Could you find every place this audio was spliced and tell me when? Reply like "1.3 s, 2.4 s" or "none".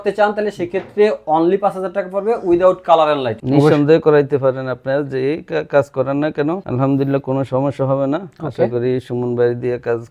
3.3 s, 6.6 s